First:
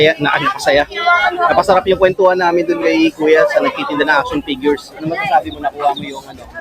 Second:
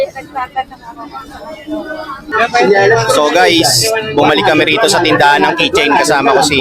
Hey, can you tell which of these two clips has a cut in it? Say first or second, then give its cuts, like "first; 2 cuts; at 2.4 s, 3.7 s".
second; 1 cut; at 2.3 s